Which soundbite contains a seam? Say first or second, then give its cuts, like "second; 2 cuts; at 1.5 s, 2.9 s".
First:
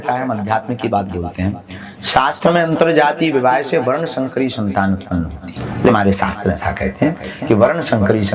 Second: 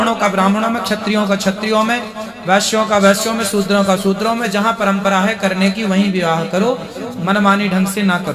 first; 1 cut; at 5.9 s